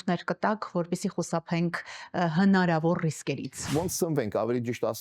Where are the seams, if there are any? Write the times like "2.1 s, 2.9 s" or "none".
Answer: 3.7 s